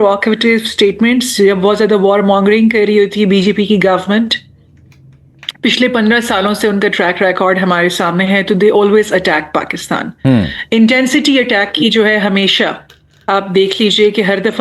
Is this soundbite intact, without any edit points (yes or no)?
yes